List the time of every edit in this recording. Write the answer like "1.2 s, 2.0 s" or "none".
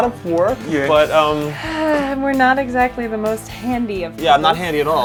none